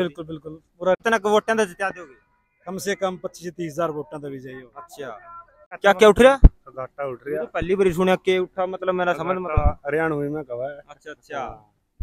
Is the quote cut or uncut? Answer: cut